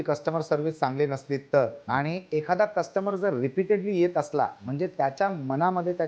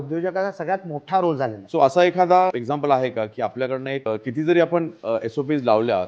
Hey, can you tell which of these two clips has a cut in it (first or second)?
second